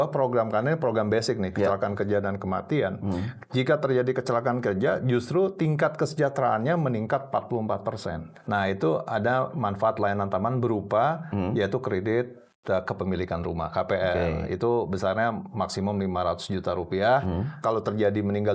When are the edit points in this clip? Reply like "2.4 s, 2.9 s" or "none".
8.4 s, 17.6 s